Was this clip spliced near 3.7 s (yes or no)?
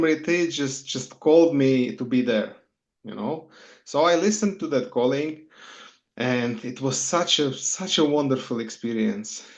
no